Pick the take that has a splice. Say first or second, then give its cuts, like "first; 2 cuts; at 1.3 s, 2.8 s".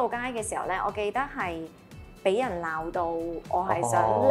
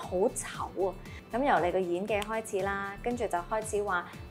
second; 1 cut; at 1.1 s